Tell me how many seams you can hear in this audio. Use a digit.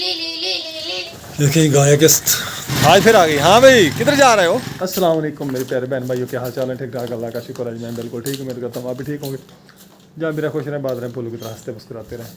3